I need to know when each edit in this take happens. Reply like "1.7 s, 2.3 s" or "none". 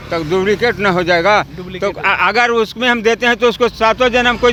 none